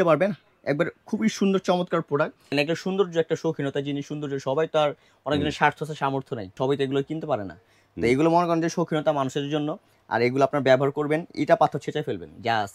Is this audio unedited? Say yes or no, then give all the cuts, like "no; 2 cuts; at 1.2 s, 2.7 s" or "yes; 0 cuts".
no; 2 cuts; at 2.4 s, 6.6 s